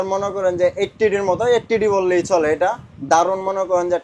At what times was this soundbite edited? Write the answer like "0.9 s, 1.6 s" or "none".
none